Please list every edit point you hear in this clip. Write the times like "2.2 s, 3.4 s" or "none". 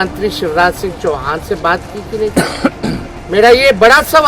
3.1 s